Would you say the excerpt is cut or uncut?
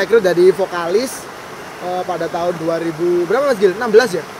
uncut